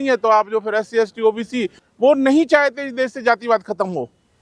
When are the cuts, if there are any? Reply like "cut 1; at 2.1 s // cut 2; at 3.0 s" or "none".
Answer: cut 1; at 1.8 s